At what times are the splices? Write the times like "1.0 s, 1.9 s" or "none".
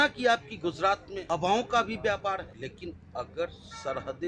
1.1 s, 2.5 s